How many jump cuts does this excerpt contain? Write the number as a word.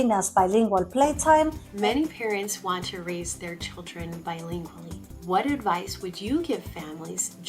two